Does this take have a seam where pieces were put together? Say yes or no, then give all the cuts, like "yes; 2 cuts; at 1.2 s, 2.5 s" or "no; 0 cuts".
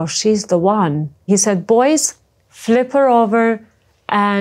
yes; 1 cut; at 1.3 s